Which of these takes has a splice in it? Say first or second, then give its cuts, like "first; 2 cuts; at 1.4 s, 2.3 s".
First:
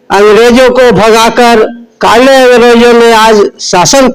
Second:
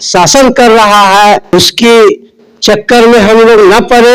second; 1 cut; at 1.5 s